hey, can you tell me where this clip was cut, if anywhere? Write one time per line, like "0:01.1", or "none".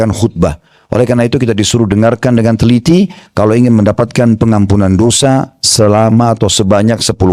none